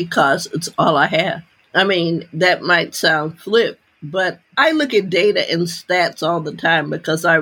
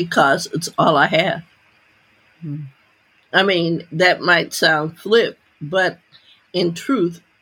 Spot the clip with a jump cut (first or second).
first